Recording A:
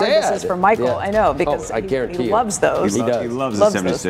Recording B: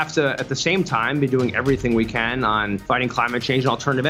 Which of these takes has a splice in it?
B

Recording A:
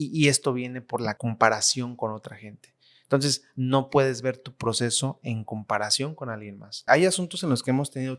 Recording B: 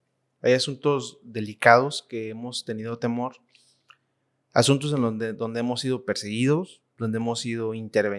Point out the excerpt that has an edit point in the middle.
A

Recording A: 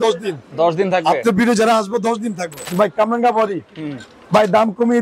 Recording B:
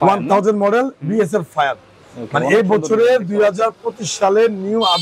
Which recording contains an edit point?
A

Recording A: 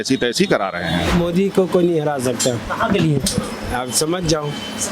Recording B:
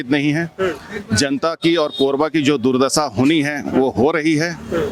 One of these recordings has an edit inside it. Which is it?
A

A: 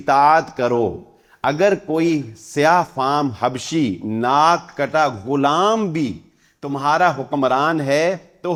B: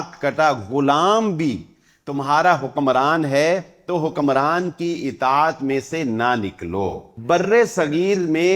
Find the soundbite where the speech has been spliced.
B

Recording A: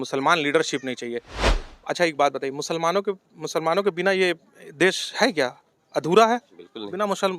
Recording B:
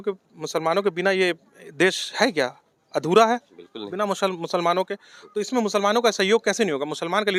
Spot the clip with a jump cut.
A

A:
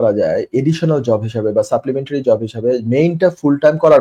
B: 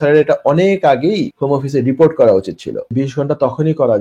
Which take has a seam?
B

